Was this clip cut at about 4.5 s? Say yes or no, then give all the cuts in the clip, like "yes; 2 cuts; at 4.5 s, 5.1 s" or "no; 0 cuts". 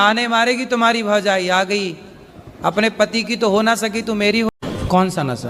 yes; 1 cut; at 4.5 s